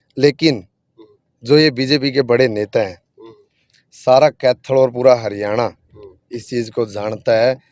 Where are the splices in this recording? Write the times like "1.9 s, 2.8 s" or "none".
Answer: none